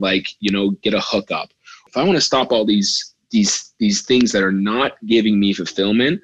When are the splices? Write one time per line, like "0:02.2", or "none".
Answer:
0:01.7